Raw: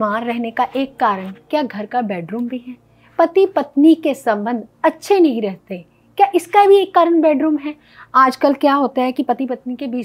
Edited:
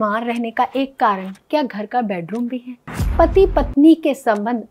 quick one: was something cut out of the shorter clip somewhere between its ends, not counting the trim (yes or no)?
no